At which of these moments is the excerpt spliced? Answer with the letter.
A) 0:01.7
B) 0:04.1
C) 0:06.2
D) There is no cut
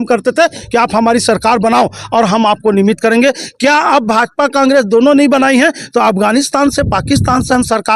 D